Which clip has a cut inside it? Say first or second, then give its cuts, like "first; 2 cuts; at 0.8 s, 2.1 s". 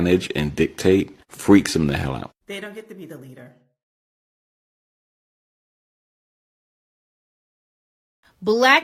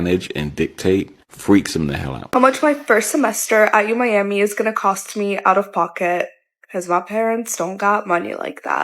second; 1 cut; at 2.2 s